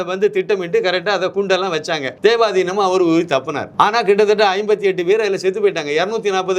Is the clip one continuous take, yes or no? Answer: no